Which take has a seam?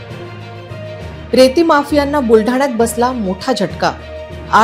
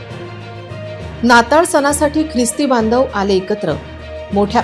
second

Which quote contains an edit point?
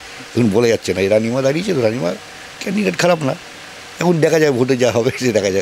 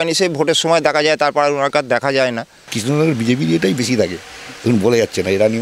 second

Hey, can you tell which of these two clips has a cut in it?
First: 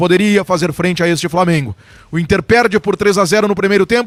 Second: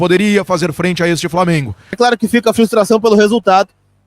second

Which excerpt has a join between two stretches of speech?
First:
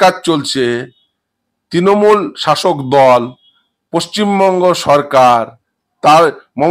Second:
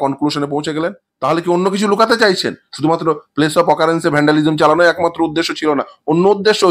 second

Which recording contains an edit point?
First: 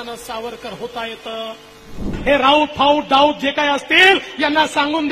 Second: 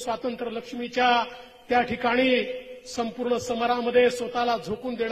first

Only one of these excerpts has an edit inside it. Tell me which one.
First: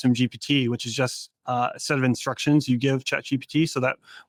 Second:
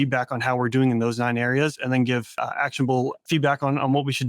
second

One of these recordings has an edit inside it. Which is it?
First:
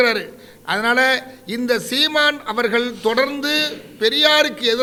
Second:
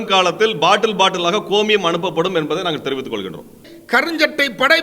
second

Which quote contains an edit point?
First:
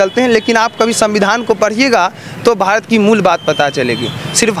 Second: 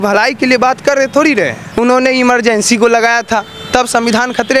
second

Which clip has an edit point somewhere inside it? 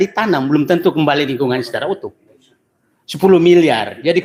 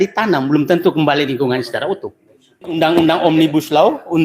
second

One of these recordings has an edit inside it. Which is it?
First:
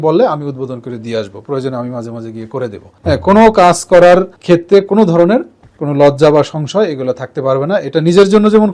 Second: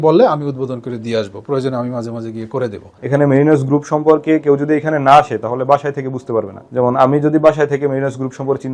second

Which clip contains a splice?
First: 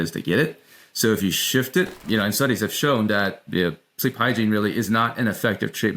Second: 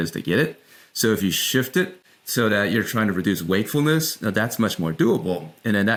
first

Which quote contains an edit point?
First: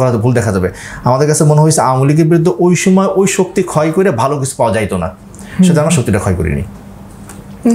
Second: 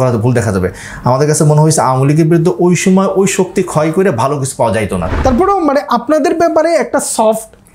second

